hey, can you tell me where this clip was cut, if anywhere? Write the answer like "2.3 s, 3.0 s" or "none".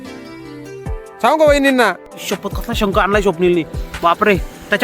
2.1 s